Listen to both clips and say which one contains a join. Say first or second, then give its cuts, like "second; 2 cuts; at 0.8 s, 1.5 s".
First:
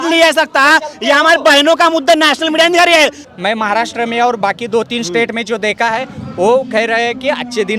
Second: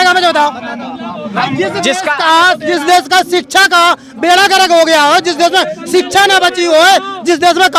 first; 1 cut; at 3.3 s